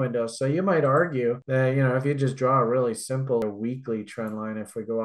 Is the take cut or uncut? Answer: cut